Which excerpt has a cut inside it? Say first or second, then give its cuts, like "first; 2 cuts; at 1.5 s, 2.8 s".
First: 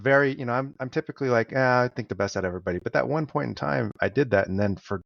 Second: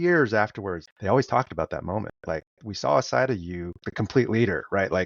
second; 3 cuts; at 0.9 s, 2.2 s, 3.8 s